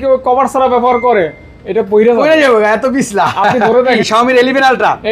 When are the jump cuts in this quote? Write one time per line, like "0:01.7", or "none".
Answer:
0:04.0

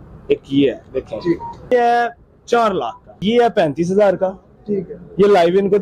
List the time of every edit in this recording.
0:01.7
0:03.2

